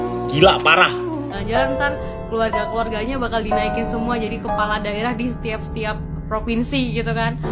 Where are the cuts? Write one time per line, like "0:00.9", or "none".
0:01.3